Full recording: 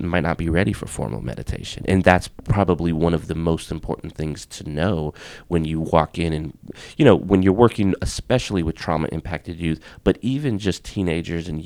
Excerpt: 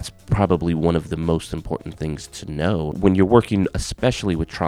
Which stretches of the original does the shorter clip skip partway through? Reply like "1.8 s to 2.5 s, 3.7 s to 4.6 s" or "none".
5.1 s to 7.2 s